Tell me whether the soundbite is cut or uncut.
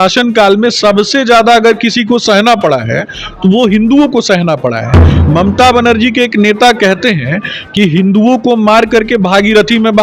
uncut